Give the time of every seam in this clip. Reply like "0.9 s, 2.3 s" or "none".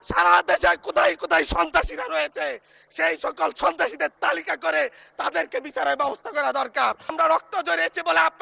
7.1 s